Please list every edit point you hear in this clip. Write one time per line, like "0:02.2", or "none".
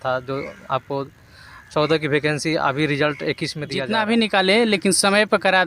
0:03.8

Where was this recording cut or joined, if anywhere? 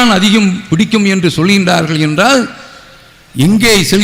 none

